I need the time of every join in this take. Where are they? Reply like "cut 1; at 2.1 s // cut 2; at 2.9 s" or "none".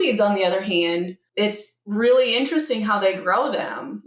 cut 1; at 1.2 s